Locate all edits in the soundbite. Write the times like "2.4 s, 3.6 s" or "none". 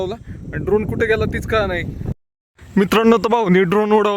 2.0 s